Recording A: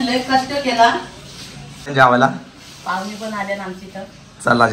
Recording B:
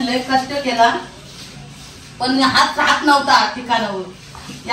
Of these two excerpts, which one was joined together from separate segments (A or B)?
A